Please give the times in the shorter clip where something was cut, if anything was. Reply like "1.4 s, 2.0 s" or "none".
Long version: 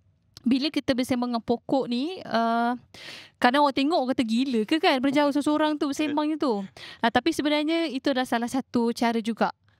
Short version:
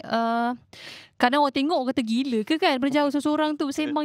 none